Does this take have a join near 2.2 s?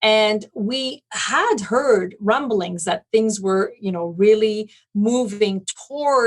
yes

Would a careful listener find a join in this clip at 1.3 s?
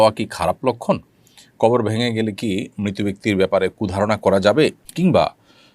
no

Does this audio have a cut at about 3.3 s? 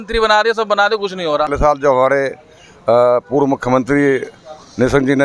no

